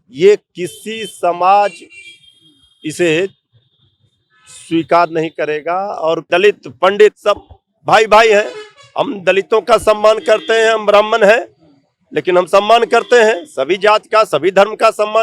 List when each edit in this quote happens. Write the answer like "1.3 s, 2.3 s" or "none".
6.3 s